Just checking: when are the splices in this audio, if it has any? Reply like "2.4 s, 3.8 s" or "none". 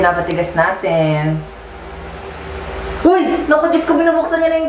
none